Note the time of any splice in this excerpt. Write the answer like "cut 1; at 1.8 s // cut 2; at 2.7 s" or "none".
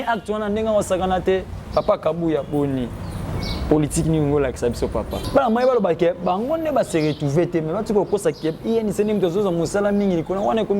cut 1; at 5.2 s